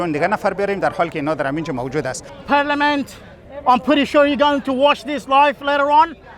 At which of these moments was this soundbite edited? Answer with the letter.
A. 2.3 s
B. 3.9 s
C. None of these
A